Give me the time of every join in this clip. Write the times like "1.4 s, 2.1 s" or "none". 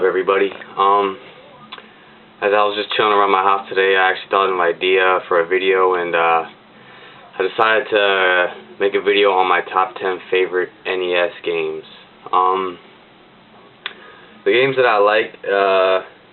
none